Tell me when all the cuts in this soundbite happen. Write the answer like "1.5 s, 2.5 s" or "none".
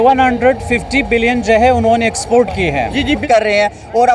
3.2 s